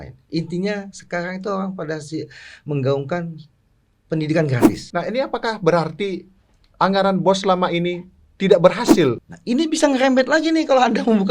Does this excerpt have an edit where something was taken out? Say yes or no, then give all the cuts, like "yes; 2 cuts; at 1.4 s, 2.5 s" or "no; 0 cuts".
yes; 2 cuts; at 4.8 s, 9.3 s